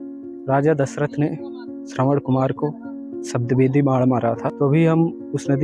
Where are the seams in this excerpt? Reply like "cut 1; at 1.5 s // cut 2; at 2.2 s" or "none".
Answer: cut 1; at 4.5 s